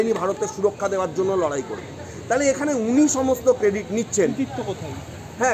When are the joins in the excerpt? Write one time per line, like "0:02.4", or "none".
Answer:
none

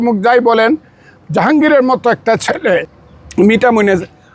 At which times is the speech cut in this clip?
0:03.0

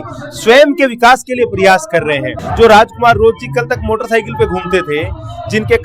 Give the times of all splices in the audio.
0:02.4

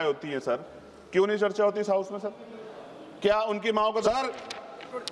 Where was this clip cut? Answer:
0:04.0

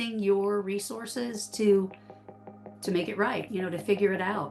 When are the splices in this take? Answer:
0:03.4

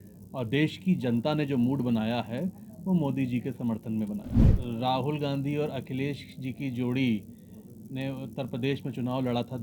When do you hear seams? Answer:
0:04.5

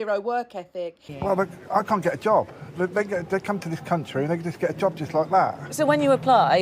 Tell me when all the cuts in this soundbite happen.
0:01.0

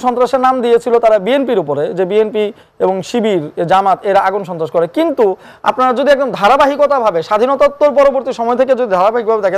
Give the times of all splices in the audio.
none

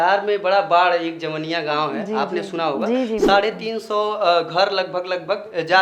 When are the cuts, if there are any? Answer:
none

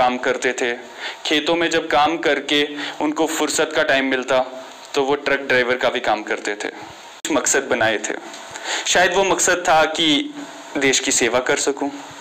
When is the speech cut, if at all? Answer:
0:07.2

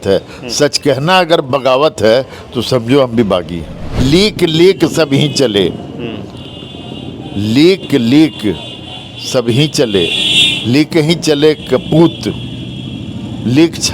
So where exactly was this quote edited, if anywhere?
0:04.0

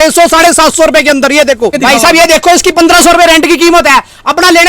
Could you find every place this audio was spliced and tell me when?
0:01.8

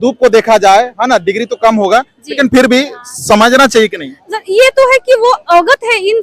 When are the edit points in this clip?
none

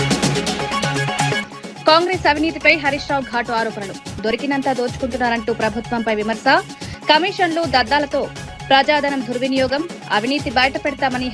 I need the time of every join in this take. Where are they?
0:01.4

